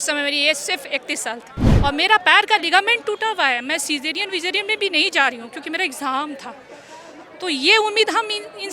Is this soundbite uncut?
no; 1 cut; at 1.6 s

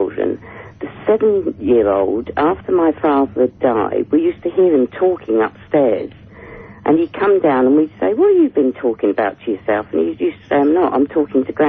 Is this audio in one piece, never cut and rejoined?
yes; 0 cuts

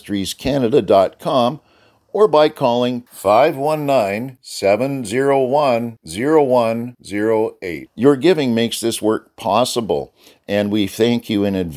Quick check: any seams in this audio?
no; 0 cuts

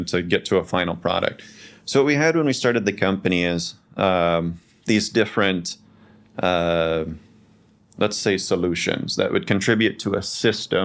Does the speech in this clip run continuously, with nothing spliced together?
yes; 0 cuts

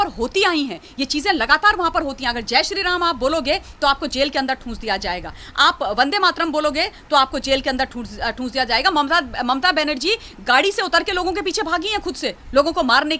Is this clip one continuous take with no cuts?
yes; 0 cuts

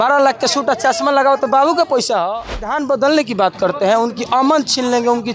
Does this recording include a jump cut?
yes; 1 cut; at 2.8 s

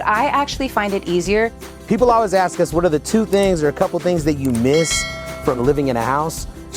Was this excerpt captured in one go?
no; 1 cut; at 1.6 s

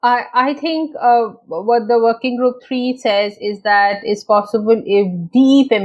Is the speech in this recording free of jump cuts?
yes; 0 cuts

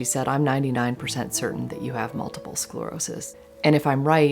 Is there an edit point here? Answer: yes; 1 cut; at 3.4 s

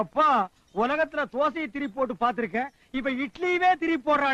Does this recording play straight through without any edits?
yes; 0 cuts

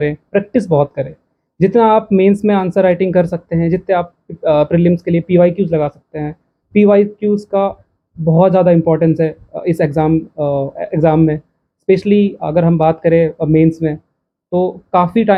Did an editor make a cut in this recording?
no; 0 cuts

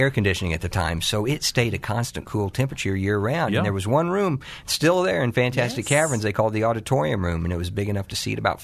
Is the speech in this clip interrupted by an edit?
no; 0 cuts

